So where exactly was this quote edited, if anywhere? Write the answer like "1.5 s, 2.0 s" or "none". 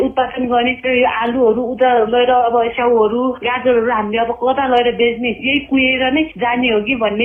none